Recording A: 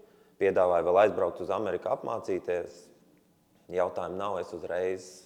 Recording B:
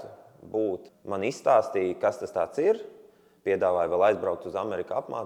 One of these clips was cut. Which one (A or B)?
B